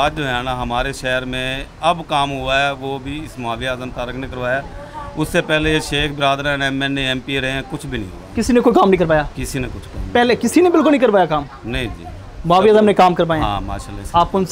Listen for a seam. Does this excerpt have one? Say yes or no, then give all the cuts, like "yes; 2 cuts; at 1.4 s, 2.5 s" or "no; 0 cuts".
no; 0 cuts